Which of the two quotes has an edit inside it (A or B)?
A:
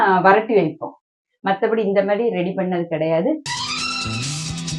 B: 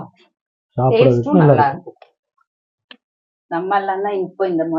A